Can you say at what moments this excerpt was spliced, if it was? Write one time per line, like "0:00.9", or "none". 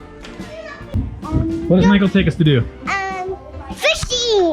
0:01.1